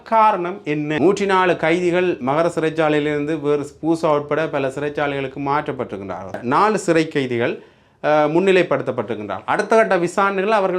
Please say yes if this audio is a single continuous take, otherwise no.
no